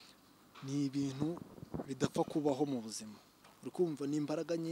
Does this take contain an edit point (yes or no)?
yes